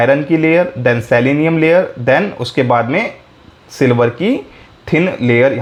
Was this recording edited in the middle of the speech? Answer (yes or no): no